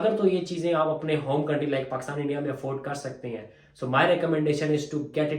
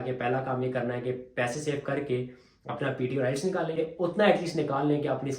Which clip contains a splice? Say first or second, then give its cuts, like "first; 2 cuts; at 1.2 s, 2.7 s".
second; 1 cut; at 3.8 s